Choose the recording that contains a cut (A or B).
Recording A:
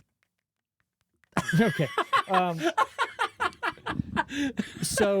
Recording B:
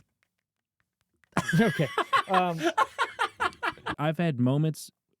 B